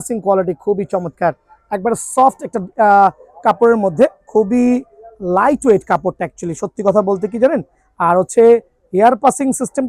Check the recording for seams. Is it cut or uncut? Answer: uncut